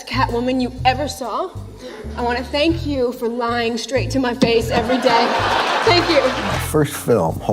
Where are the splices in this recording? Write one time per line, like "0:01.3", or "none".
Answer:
0:06.5